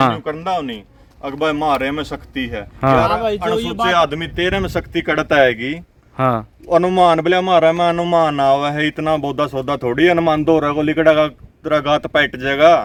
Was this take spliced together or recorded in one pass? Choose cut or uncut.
uncut